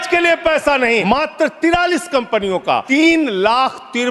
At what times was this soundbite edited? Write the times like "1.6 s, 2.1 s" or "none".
1.0 s, 2.8 s